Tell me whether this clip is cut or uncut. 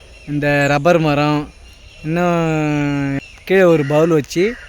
cut